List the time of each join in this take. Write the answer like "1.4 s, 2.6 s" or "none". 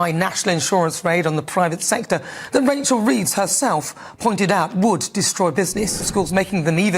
5.9 s